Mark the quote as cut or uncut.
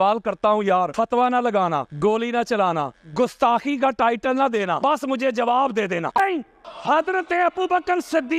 cut